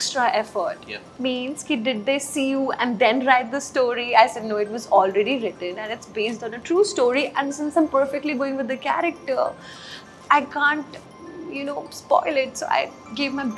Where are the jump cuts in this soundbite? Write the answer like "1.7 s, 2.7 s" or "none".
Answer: 1.0 s